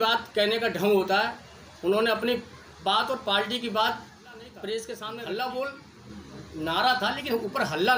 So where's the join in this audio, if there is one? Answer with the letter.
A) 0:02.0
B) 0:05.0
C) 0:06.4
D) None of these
B